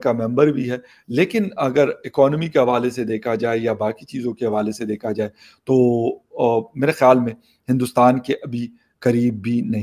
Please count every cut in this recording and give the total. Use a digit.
0